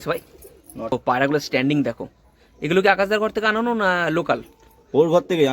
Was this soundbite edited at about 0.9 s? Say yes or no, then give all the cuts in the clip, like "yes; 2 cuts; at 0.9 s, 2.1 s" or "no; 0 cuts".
yes; 1 cut; at 0.9 s